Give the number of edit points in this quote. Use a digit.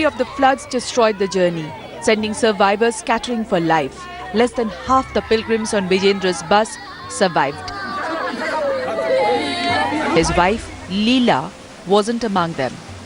1